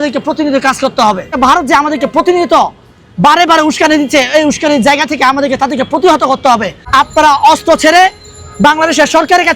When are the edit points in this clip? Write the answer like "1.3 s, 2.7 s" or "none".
1.4 s, 6.8 s